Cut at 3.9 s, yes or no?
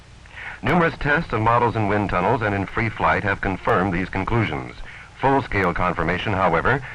yes